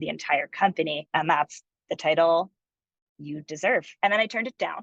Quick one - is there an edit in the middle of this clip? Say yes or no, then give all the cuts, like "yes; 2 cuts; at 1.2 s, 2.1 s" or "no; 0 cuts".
yes; 1 cut; at 3.9 s